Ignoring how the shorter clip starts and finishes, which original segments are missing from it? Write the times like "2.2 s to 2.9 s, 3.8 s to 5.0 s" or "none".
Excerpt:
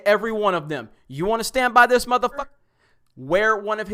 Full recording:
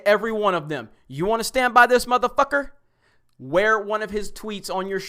2.4 s to 2.6 s

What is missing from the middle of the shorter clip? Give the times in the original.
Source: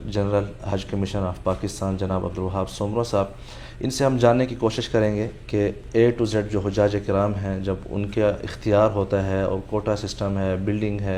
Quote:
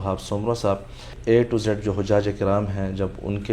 3.6 s to 5.8 s

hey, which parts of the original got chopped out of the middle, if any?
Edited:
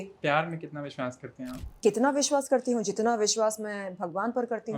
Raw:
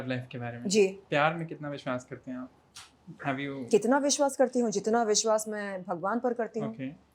2.6 s to 3.6 s

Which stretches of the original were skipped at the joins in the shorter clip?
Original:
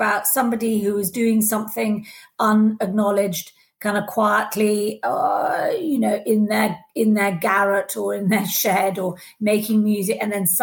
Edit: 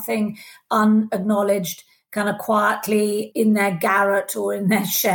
4.9 s to 6.9 s

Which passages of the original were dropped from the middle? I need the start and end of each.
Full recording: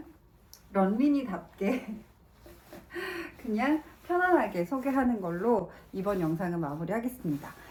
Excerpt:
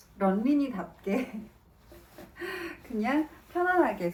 none

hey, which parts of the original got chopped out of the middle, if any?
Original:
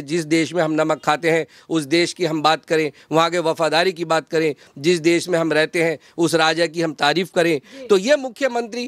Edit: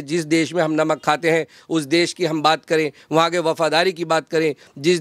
none

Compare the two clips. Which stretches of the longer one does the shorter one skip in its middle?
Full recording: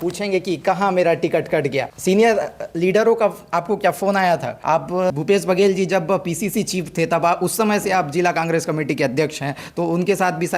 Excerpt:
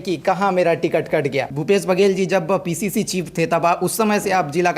2.0 s to 5.2 s

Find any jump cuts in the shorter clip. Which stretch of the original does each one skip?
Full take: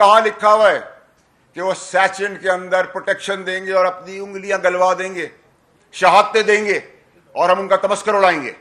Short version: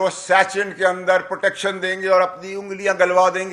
none

